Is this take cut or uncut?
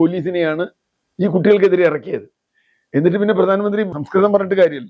cut